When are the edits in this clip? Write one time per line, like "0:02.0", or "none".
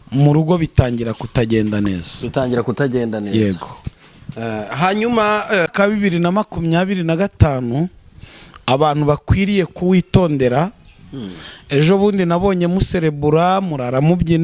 0:05.7